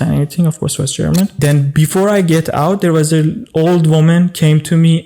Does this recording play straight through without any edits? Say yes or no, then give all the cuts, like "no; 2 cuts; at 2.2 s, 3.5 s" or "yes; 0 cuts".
no; 1 cut; at 1.4 s